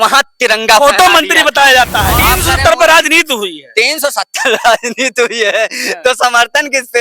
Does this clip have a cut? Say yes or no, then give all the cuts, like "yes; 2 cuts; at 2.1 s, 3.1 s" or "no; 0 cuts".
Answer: yes; 1 cut; at 2.1 s